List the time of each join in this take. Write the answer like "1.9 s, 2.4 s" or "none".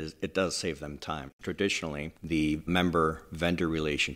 1.3 s, 2.6 s